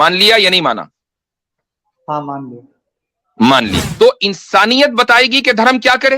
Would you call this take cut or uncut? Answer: cut